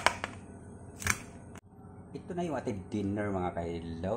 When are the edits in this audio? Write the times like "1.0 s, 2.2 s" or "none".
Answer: 1.6 s